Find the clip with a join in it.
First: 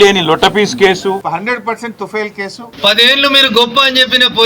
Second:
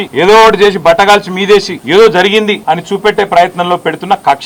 first; 2 cuts; at 1.2 s, 2.6 s

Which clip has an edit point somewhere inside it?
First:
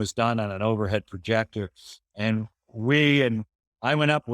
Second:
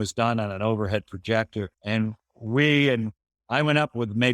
second; 1 cut; at 1.8 s

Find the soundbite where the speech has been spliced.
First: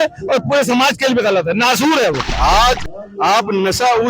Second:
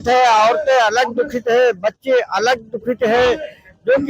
first; 1 cut; at 2.3 s

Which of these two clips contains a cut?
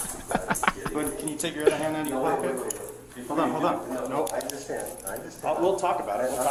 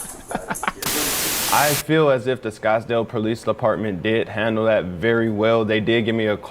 second; 1 cut; at 1.3 s

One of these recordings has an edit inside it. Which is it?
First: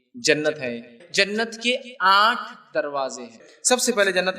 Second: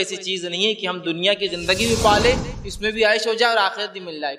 first; 2 cuts; at 0.9 s, 3.5 s

